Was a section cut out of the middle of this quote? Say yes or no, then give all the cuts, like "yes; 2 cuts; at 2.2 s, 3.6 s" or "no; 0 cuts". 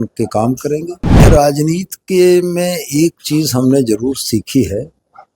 yes; 1 cut; at 1.2 s